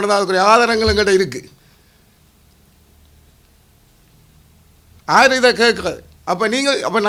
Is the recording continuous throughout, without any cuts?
yes; 0 cuts

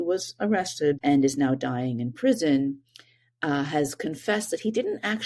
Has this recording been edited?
yes; 1 cut; at 1.0 s

